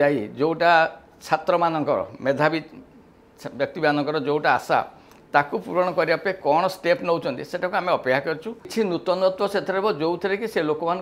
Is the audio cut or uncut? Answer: cut